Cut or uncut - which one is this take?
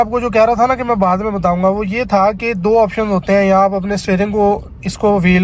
uncut